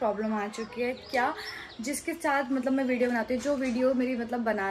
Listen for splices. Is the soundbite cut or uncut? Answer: uncut